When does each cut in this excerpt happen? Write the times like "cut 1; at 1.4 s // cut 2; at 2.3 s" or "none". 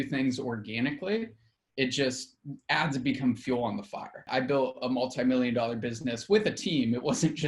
cut 1; at 4.3 s